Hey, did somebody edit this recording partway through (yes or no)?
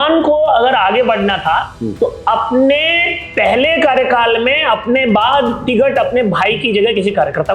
no